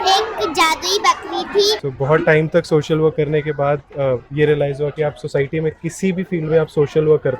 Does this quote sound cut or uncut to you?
cut